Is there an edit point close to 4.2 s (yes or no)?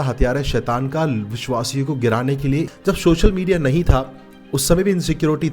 no